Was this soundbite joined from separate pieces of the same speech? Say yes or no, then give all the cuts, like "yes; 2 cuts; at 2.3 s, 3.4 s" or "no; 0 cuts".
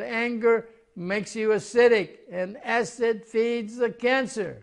no; 0 cuts